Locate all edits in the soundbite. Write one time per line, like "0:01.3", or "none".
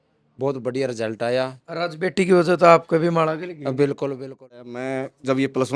0:04.7